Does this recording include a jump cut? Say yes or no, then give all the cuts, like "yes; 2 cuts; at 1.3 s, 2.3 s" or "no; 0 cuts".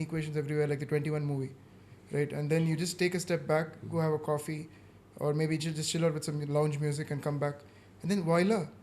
no; 0 cuts